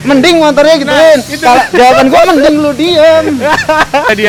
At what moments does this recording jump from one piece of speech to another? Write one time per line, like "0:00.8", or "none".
none